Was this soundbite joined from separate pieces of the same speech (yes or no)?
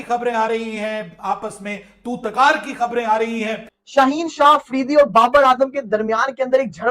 yes